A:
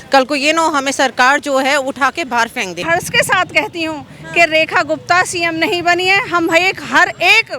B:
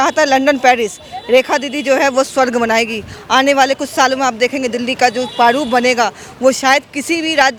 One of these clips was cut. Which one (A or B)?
A